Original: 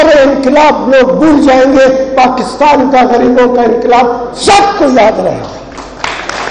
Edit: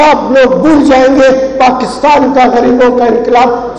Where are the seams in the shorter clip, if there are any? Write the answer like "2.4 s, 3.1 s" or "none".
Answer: none

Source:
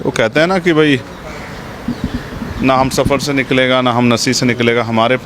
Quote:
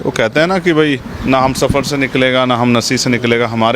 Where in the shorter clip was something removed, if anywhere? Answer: 1.1 s

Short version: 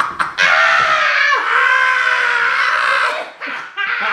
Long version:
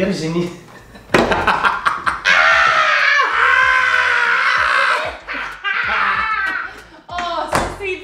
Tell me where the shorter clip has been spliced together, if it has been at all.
none

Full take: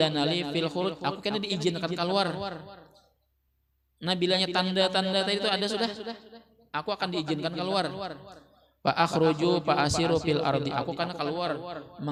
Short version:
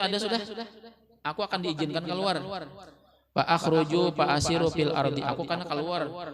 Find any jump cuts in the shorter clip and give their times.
none

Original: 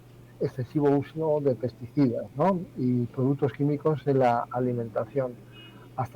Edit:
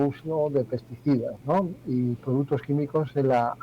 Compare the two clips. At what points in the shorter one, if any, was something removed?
none

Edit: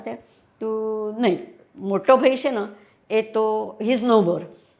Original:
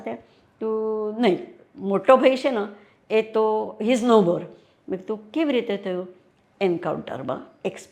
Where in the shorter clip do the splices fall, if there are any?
none

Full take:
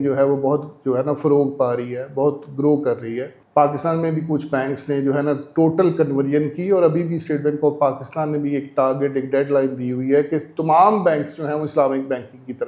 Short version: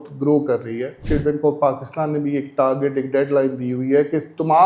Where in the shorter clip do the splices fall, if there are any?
1.0 s

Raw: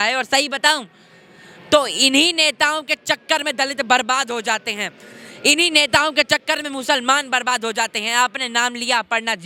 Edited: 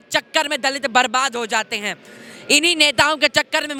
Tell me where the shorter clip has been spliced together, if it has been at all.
none

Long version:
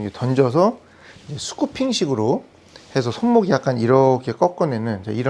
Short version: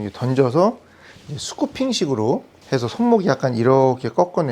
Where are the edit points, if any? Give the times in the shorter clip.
2.5 s

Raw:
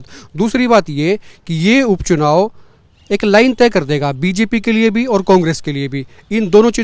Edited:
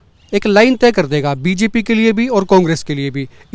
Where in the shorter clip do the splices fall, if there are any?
none

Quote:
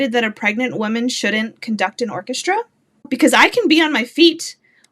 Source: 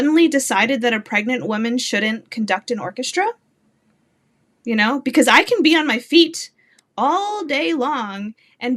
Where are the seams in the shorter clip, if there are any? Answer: 3.1 s

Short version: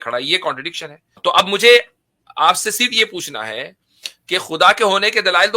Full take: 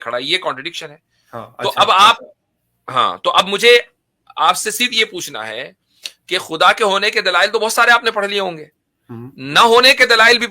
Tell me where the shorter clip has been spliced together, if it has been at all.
1.2 s

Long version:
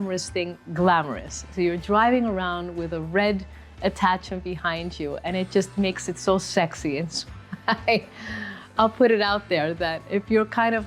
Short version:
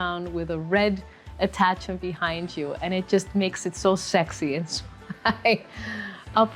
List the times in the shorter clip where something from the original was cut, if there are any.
none

